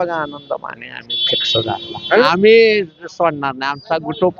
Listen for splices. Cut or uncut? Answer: cut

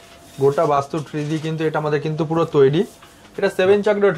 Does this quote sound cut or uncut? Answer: uncut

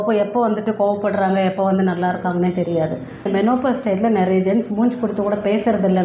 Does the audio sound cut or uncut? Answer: cut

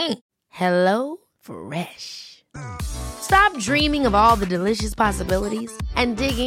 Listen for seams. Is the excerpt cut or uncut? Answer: uncut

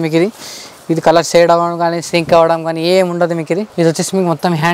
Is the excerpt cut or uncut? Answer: cut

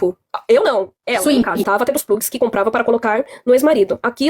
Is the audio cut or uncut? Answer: cut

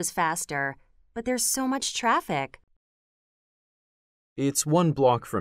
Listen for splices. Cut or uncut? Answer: uncut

